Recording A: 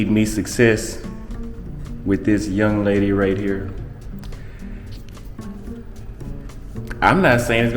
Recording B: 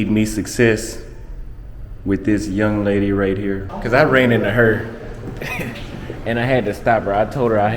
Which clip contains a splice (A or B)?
B